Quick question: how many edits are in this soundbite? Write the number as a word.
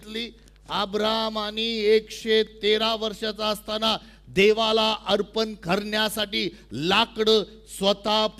zero